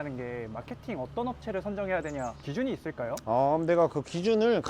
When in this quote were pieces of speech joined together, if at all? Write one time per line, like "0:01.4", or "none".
0:02.4

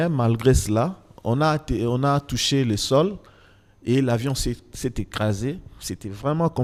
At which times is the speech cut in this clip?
none

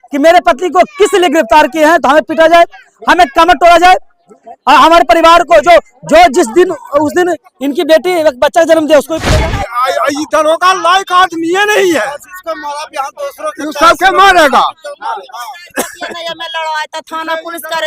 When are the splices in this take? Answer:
0:09.2

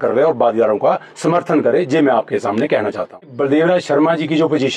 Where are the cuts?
0:03.3

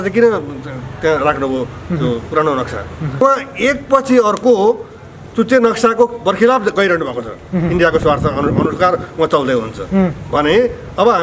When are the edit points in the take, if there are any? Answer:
0:03.2

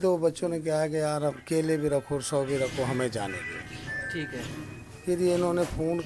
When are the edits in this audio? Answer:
none

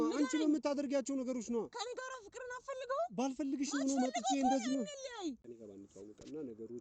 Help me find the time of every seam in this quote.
0:05.4

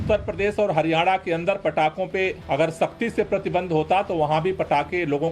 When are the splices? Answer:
0:02.4

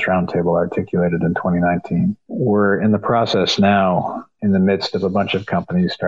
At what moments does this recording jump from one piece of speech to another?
0:02.3
0:04.2

